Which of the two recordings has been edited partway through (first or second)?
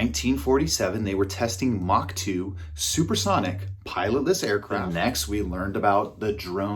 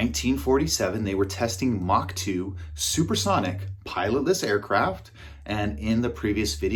first